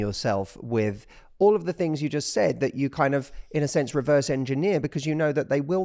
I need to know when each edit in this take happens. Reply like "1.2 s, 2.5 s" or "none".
none